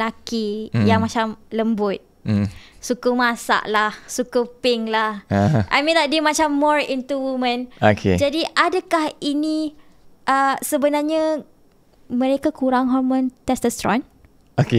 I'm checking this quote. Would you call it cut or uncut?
uncut